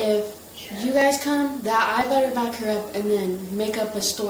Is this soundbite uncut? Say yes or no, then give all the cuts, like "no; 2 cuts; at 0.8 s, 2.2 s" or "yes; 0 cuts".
yes; 0 cuts